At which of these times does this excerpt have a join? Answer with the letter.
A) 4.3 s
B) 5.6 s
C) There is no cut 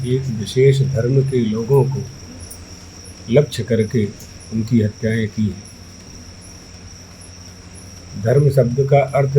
C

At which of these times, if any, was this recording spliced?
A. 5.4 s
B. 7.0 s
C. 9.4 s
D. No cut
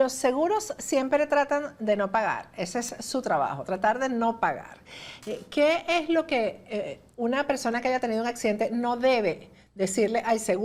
D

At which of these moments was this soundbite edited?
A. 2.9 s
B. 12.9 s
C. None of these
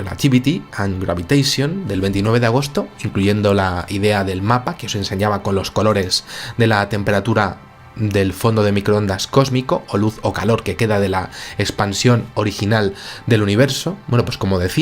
B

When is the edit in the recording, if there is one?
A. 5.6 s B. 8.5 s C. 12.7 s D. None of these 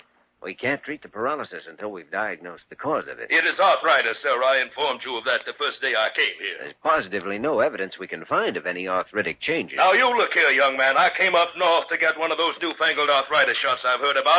D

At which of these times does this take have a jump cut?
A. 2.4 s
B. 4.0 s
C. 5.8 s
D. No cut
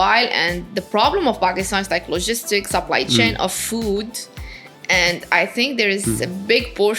D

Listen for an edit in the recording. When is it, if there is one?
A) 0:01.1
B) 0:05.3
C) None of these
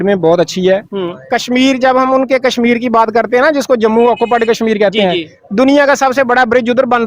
C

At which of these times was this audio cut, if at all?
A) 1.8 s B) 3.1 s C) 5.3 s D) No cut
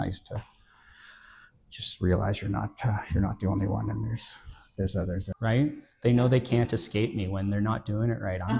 C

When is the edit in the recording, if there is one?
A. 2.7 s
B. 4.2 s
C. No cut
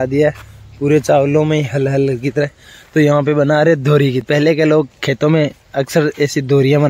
B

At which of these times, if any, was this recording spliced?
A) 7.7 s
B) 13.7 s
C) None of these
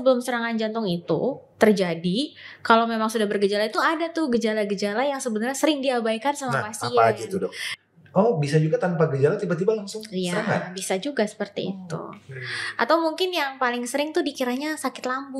A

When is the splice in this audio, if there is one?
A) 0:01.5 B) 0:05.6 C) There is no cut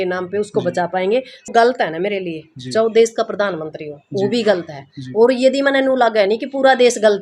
A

